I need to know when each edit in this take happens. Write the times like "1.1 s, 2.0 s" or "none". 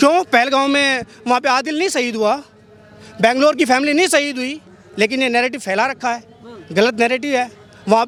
none

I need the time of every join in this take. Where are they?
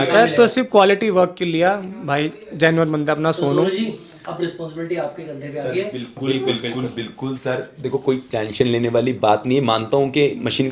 none

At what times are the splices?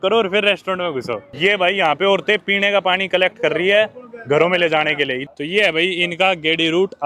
1.2 s, 5.2 s

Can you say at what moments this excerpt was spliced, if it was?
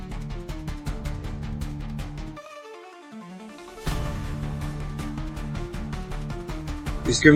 none

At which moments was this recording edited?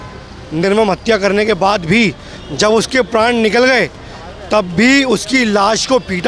none

